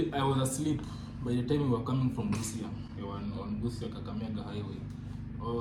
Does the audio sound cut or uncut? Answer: uncut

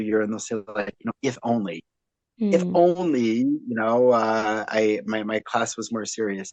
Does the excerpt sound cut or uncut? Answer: uncut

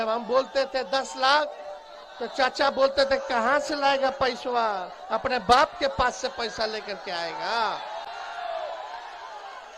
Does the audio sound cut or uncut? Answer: uncut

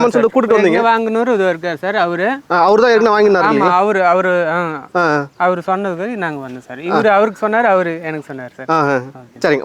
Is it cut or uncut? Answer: uncut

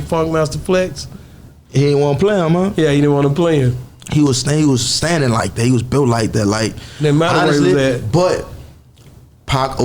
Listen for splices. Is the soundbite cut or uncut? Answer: cut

